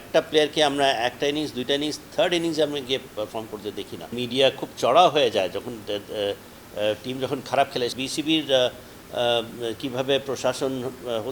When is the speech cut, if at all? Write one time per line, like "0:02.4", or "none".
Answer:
0:04.1
0:07.9